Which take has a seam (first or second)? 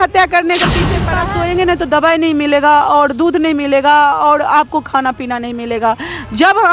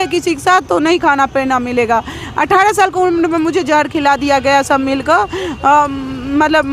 first